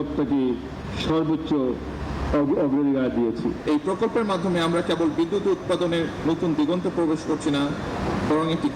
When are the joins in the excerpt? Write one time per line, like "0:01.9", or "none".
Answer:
0:03.6